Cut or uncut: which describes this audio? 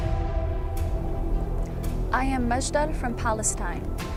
uncut